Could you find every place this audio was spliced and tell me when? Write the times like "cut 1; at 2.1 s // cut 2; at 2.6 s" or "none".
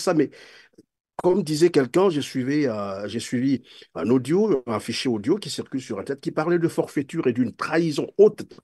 none